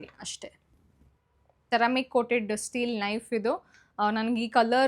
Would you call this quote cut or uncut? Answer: cut